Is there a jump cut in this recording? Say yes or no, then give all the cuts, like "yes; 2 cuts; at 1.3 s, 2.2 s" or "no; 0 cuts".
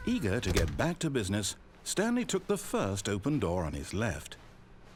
no; 0 cuts